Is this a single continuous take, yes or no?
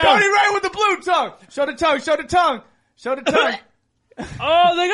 yes